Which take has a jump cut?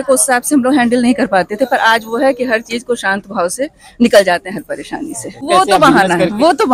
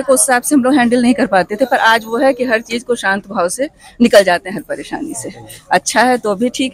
first; 1 cut; at 5.3 s

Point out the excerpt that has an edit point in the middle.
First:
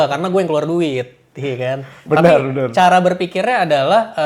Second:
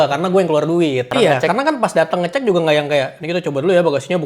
second; 1 cut; at 1.1 s

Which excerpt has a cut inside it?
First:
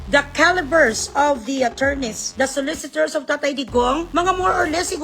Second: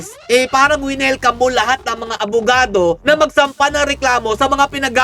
first; 2 cuts; at 2.2 s, 4.1 s

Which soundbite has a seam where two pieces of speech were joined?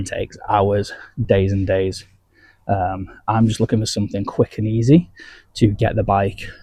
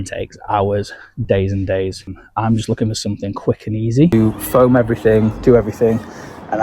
second; 2 cuts; at 2.2 s, 4.1 s

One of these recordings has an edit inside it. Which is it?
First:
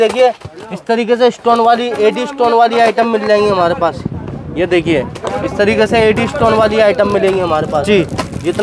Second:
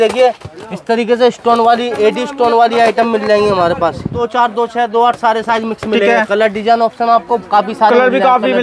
second; 1 cut; at 4.2 s

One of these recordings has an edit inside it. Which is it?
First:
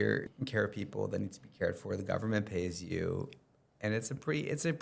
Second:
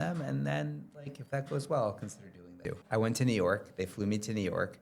second; 1 cut; at 2.8 s

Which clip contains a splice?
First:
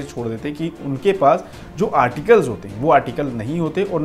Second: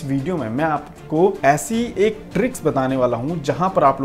second; 1 cut; at 1.4 s

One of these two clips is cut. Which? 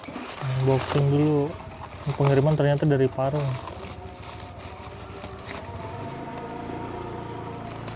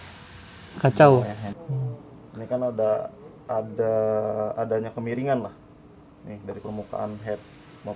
second; 1 cut; at 1.5 s

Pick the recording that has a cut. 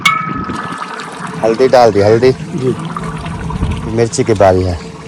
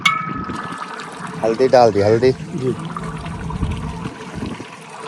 first; 1 cut; at 3.9 s

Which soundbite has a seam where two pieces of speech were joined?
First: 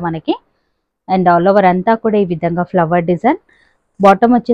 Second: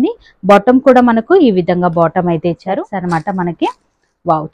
second; 1 cut; at 2.9 s

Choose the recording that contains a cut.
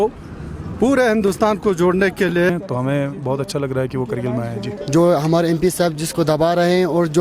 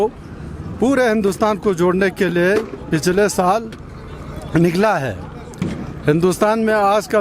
first; 2 cuts; at 2.5 s, 4.7 s

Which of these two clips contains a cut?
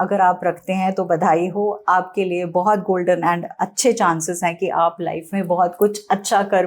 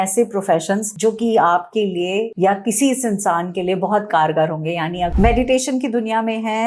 second; 3 cuts; at 0.9 s, 2.3 s, 5.1 s

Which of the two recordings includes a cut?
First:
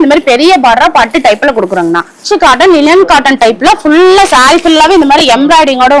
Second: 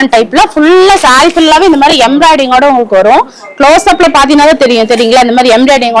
first; 1 cut; at 2.2 s

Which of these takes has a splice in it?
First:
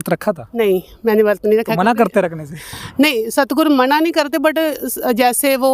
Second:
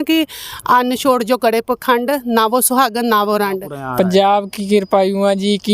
second; 1 cut; at 3.8 s

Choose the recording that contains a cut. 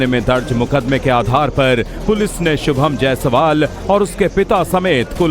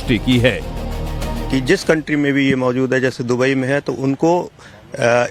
first; 1 cut; at 3.3 s

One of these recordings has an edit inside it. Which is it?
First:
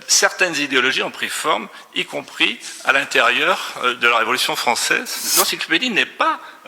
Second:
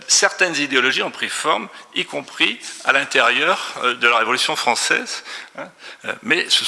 first; 1 cut; at 5.2 s

